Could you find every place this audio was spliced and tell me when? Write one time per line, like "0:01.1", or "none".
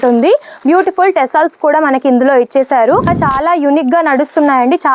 0:03.1